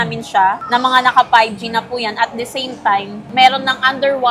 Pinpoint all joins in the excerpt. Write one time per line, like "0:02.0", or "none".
none